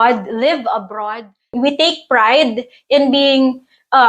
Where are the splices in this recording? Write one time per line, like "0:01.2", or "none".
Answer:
0:01.5

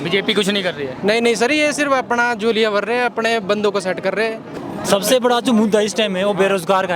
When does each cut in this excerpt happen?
0:04.6

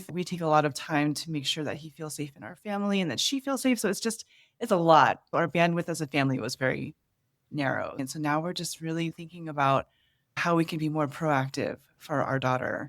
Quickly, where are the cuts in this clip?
0:05.3
0:10.4

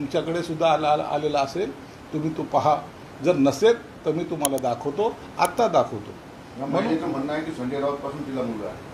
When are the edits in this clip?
none

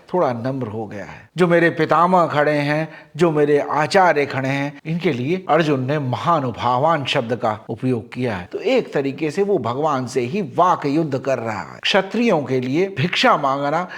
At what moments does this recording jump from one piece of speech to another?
0:01.2
0:08.4
0:11.8

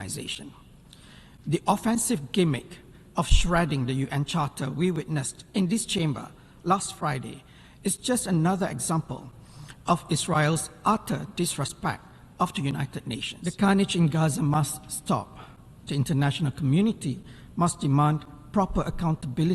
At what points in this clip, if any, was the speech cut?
0:13.3

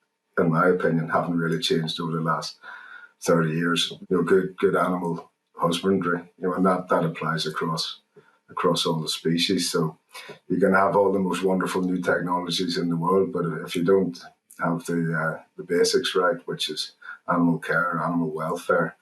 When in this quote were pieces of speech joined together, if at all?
0:03.9

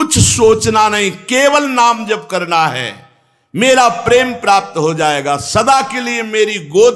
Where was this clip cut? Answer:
none

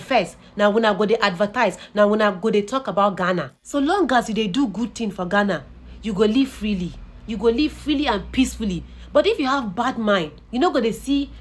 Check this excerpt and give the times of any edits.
0:03.6

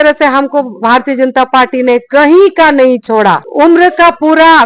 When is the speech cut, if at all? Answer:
0:03.5

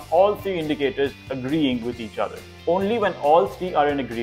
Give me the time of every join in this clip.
0:02.5

